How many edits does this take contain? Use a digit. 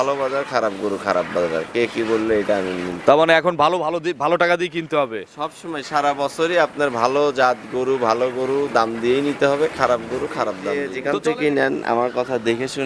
1